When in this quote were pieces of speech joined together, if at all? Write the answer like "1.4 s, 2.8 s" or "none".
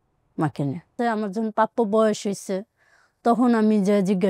0.9 s